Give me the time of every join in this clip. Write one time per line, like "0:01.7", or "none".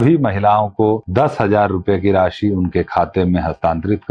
0:01.0